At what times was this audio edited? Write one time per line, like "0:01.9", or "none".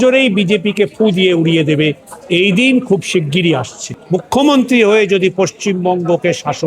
0:03.9

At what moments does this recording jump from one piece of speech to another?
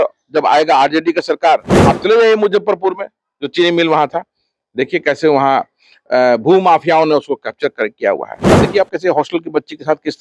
0:01.7
0:08.5

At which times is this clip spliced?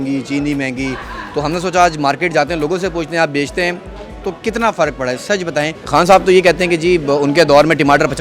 0:05.8

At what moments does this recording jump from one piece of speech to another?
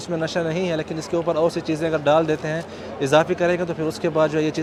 none

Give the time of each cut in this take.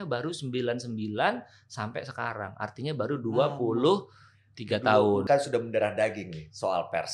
0:05.2

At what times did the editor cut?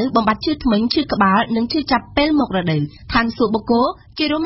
0:03.0

